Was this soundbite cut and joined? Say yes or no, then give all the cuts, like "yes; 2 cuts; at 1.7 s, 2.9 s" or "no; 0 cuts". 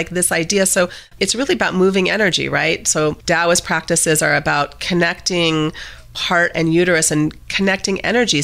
yes; 3 cuts; at 1.1 s, 3.2 s, 6.2 s